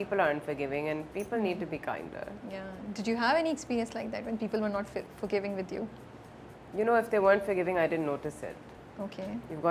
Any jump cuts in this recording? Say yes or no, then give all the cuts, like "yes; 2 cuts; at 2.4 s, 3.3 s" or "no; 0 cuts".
no; 0 cuts